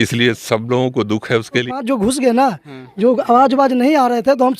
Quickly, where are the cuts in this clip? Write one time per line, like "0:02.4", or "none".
0:01.7